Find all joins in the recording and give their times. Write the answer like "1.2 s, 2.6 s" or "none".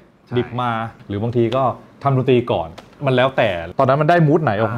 1.0 s, 3.7 s